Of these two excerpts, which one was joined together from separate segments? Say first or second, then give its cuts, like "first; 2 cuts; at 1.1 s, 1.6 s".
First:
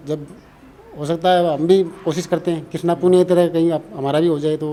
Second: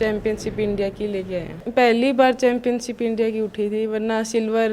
second; 1 cut; at 1.6 s